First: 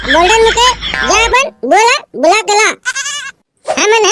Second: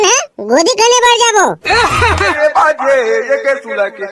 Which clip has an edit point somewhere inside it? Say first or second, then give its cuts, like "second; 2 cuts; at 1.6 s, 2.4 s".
second; 1 cut; at 2.3 s